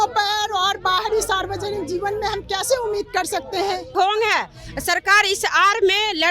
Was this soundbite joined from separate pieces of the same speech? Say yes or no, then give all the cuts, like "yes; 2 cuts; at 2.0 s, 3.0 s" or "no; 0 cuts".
yes; 1 cut; at 3.9 s